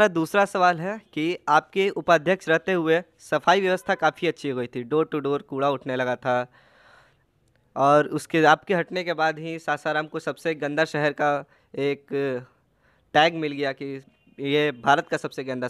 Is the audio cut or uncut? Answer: uncut